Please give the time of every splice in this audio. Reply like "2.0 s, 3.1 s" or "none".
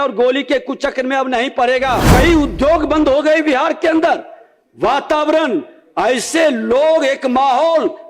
2.1 s